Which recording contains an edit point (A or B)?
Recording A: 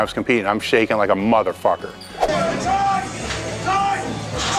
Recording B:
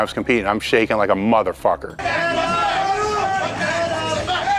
B